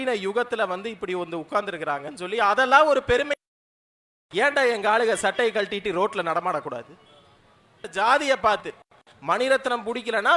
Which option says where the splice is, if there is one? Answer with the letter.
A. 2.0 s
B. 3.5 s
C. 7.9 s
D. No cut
C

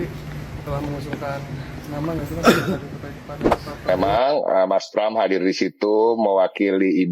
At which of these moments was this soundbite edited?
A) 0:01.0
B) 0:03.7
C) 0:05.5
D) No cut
B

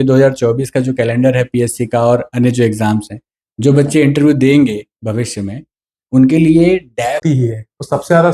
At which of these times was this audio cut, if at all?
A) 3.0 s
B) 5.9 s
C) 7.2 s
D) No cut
C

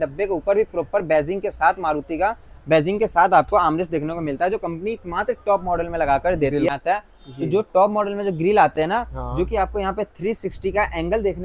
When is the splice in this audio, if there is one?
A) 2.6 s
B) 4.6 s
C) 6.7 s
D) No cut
C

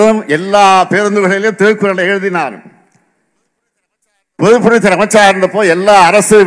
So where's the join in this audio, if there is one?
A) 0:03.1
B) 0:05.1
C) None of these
C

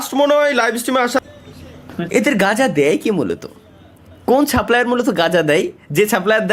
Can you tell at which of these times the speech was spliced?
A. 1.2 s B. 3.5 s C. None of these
A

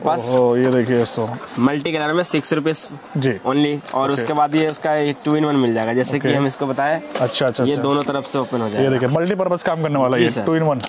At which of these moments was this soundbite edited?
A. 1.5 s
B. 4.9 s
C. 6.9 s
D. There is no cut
D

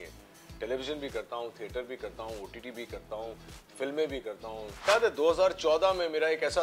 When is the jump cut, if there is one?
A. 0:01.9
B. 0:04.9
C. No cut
B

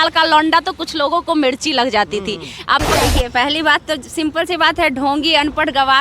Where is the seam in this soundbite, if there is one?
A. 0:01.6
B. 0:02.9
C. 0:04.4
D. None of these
B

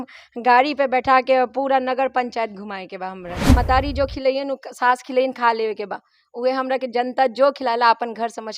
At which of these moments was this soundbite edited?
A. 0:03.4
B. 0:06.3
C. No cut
A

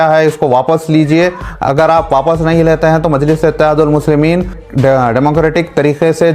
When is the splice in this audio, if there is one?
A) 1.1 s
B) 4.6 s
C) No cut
B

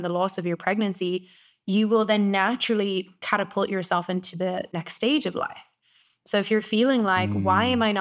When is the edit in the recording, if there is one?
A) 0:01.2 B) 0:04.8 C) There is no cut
B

